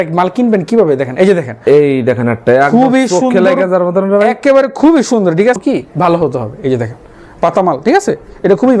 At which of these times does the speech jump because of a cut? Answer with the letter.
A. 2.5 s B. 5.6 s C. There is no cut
B